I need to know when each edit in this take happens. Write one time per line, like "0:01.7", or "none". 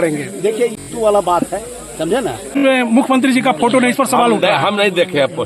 0:00.8
0:02.5